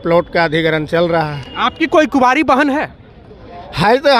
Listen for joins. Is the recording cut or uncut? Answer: uncut